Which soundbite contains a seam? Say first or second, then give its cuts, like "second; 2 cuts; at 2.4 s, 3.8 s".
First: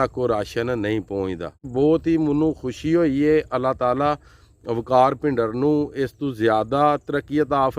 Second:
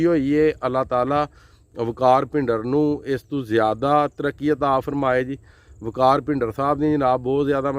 first; 1 cut; at 1.7 s